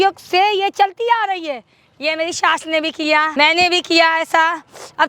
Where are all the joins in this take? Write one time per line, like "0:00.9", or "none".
0:03.3